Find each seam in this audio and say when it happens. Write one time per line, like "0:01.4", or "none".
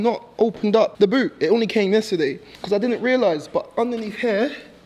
none